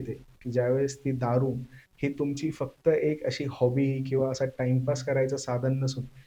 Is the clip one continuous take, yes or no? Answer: yes